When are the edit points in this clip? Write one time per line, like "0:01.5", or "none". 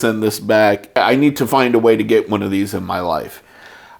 0:01.0